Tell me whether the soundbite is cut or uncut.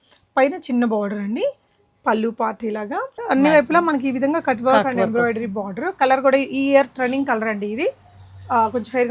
cut